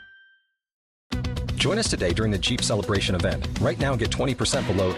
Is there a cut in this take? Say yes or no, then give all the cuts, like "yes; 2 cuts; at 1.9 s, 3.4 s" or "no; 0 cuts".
no; 0 cuts